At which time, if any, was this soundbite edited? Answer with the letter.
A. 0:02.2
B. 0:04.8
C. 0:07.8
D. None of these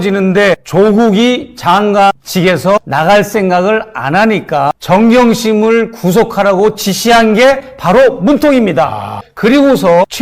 B